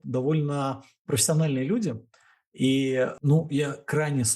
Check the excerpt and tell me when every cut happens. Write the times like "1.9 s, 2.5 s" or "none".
3.2 s